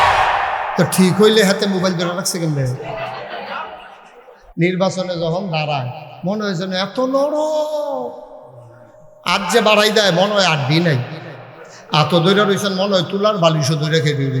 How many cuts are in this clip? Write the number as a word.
one